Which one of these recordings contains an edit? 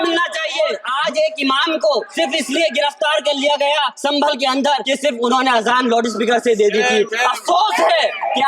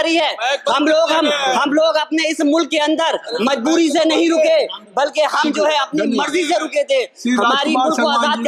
first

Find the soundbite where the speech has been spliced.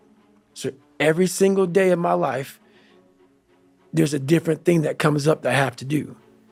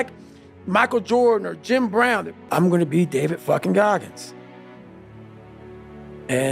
second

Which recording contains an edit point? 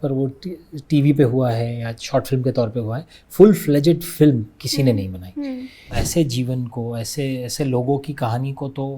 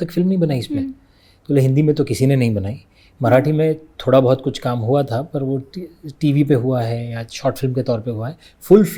first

